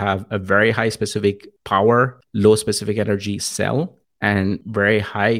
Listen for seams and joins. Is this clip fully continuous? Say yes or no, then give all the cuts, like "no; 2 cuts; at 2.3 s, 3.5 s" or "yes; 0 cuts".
no; 3 cuts; at 1.5 s, 2.2 s, 4.4 s